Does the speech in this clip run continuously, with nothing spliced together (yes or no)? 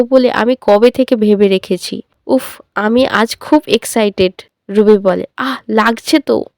no